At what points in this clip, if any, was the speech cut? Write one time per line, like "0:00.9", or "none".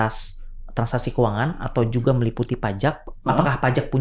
0:03.1